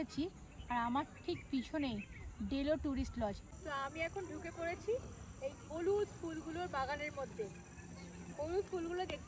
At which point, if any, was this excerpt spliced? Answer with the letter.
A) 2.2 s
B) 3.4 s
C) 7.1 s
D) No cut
B